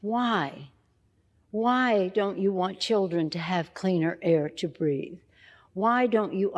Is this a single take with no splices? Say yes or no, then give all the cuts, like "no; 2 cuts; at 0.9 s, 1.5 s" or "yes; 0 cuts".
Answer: yes; 0 cuts